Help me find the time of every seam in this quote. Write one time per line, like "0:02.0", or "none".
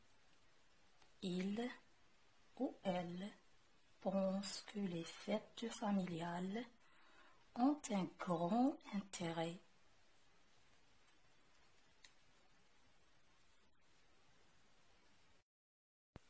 0:15.4